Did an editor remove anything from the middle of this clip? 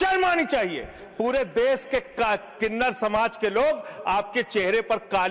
no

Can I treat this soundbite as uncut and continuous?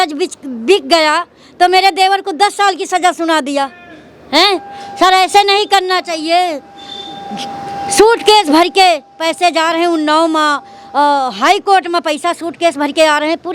yes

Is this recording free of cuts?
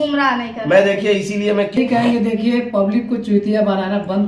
no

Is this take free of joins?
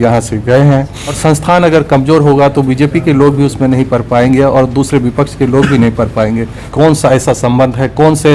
no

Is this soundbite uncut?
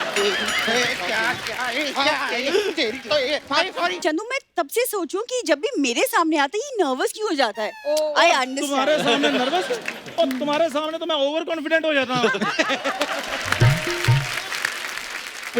no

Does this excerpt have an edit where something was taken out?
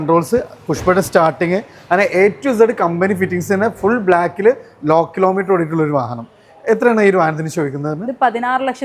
no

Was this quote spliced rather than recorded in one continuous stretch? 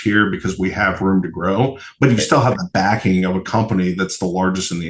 no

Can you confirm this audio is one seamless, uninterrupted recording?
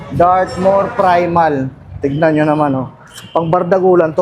yes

